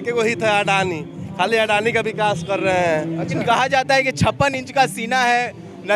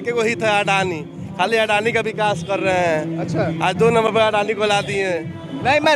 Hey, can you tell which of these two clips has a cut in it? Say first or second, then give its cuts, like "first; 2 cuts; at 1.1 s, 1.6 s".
first; 1 cut; at 3.4 s